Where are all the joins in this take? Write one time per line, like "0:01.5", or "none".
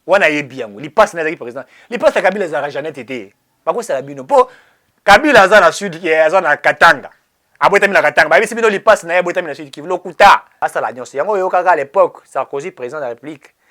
0:10.5